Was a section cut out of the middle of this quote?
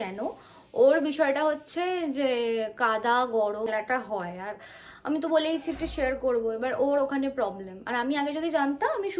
yes; 1 cut; at 3.7 s

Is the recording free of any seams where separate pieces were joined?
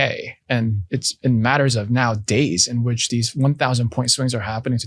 yes; 0 cuts

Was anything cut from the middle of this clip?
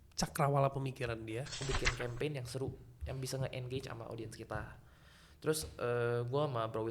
yes; 1 cut; at 1.6 s

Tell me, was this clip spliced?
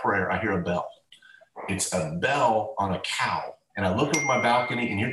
yes; 1 cut; at 3.6 s

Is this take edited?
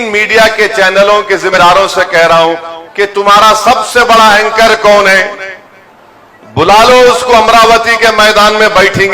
yes; 1 cut; at 1.6 s

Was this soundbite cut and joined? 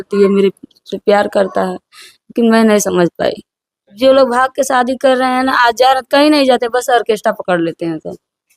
yes; 1 cut; at 3.9 s

